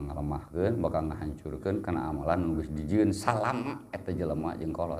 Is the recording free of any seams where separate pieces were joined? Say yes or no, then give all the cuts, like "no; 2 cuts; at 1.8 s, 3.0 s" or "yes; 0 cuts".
yes; 0 cuts